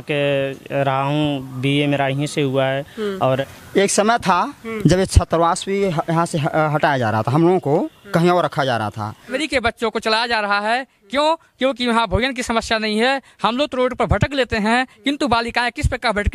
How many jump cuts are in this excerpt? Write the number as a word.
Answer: two